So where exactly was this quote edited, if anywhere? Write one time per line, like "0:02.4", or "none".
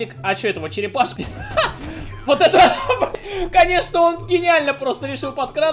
0:01.1
0:03.1

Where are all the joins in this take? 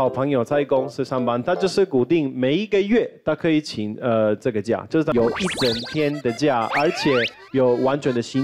0:05.1

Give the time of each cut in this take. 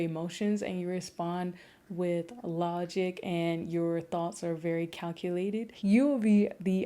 0:05.7

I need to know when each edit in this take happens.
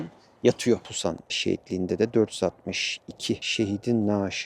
0:00.9

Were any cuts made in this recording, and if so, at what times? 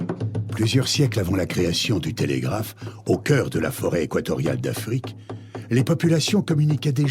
0:01.0

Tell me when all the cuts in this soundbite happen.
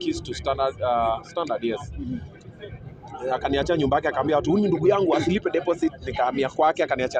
none

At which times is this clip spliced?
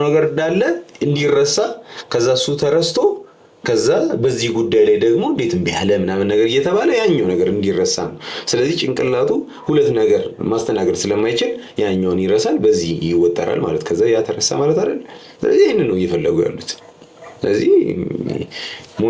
none

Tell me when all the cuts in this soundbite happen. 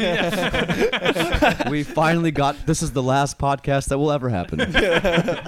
0:01.6

